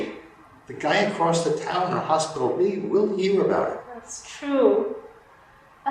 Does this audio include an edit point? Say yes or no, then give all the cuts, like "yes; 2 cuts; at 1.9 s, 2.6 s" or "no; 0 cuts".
no; 0 cuts